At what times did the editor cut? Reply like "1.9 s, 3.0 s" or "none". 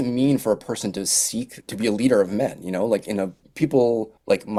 none